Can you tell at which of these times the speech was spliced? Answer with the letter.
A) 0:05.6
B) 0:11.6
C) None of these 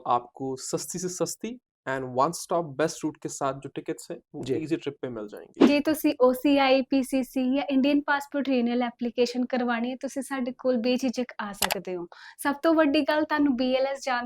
A